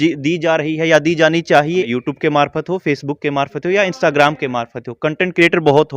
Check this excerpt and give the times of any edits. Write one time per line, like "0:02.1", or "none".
0:01.9